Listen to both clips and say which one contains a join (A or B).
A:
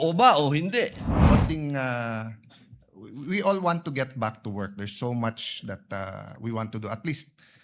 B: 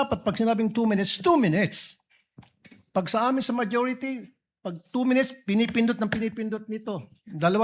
A